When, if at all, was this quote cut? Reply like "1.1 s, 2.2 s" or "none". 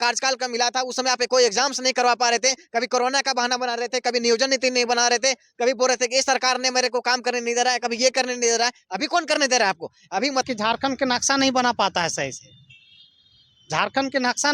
10.5 s